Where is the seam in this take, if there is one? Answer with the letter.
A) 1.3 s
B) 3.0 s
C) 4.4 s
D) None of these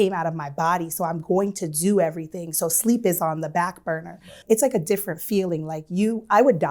C